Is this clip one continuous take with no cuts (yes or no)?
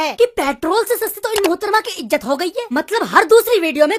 yes